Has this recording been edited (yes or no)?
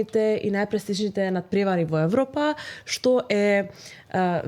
no